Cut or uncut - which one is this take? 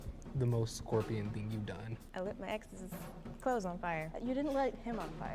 cut